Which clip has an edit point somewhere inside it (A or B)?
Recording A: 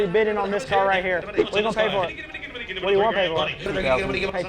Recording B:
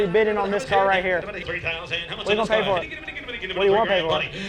A